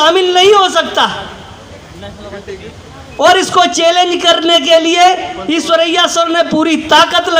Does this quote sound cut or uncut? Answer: uncut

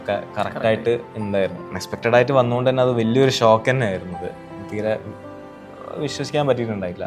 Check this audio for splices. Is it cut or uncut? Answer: cut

